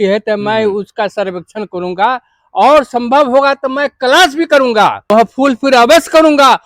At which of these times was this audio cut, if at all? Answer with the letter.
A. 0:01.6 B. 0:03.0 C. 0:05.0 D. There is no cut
C